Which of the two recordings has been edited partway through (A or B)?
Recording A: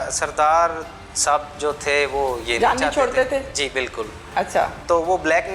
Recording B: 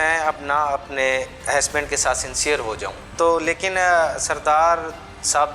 B